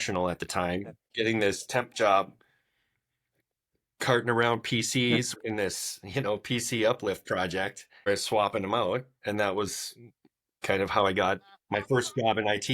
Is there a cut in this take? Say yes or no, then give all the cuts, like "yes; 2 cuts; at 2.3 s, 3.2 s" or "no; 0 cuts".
yes; 3 cuts; at 1.0 s, 5.4 s, 8.1 s